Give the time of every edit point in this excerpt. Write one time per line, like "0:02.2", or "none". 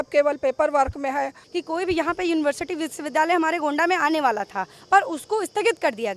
0:01.4